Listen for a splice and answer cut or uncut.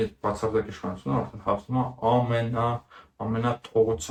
uncut